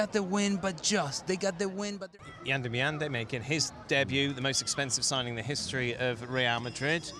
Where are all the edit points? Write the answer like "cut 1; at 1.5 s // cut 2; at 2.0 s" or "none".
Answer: cut 1; at 2.1 s